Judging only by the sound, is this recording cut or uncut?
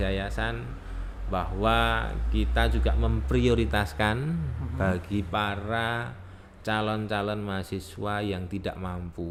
uncut